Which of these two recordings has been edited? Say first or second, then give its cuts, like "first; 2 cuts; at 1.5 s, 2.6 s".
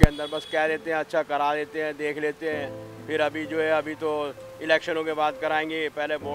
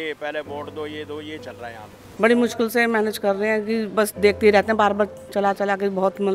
second; 1 cut; at 2.0 s